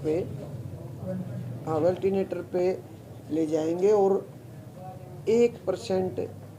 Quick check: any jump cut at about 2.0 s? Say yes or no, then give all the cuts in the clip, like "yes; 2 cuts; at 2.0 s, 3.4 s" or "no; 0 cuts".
no; 0 cuts